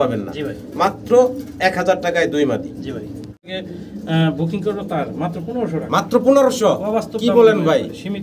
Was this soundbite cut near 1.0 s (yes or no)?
no